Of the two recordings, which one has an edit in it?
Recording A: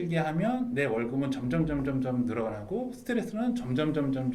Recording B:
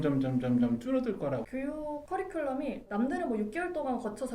B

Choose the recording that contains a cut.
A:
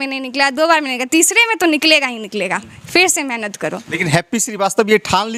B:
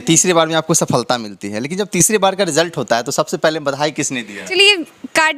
B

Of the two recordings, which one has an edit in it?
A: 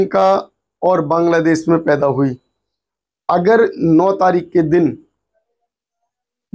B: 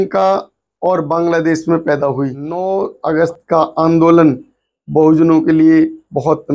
B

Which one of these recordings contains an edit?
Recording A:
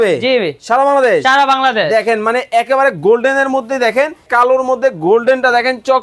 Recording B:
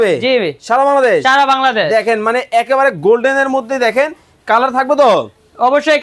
A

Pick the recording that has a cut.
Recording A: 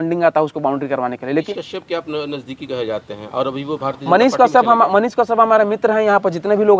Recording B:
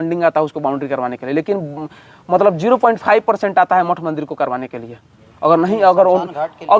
A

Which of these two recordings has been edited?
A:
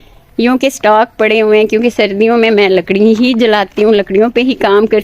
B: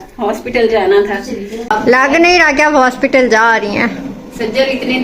B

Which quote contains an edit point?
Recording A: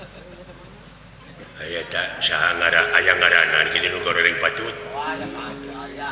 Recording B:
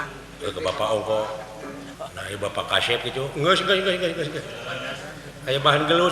B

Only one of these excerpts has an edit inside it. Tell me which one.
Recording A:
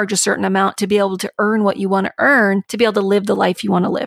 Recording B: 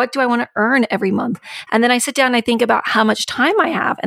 A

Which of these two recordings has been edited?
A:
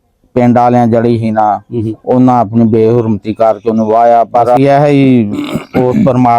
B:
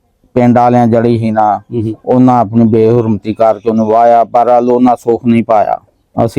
A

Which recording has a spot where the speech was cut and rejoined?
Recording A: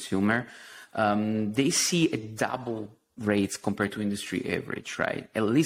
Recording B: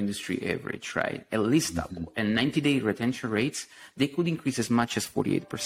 A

